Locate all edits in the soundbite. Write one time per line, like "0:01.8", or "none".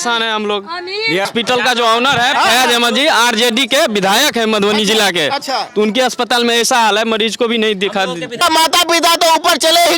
0:01.3
0:08.4